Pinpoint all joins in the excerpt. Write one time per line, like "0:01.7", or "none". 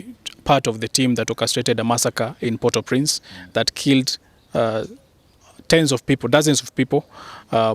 none